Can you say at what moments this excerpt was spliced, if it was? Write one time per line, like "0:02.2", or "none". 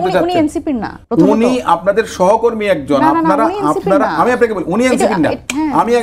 0:00.9